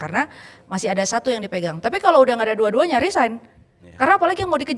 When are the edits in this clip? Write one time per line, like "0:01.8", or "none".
none